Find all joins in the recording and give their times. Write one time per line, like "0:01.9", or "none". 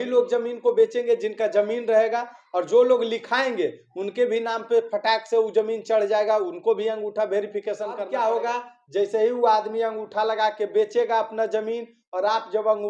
0:08.0